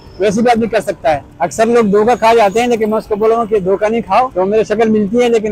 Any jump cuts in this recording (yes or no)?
yes